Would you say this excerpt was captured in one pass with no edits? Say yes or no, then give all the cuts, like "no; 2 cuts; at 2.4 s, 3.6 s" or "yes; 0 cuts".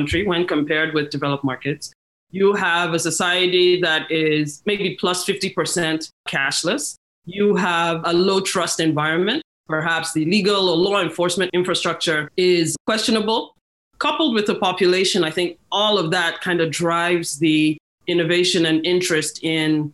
no; 3 cuts; at 9.5 s, 11.8 s, 13.6 s